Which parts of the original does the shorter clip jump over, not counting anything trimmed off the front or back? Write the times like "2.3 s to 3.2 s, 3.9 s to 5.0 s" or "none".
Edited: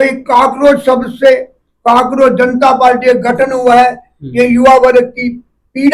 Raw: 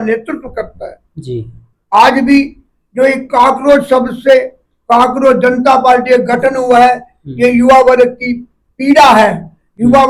none